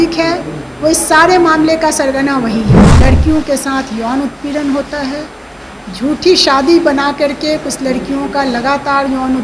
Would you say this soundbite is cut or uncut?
cut